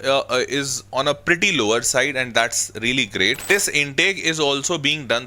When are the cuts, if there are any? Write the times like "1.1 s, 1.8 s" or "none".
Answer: 3.4 s